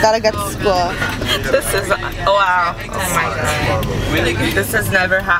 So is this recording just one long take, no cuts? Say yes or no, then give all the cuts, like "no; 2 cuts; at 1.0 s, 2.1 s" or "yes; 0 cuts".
yes; 0 cuts